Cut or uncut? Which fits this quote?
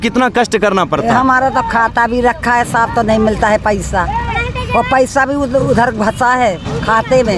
uncut